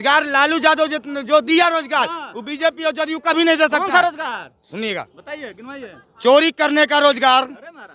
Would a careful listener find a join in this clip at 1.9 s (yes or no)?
no